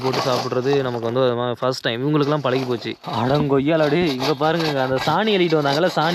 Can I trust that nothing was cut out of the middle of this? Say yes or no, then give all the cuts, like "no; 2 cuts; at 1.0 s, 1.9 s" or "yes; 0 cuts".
no; 1 cut; at 3.0 s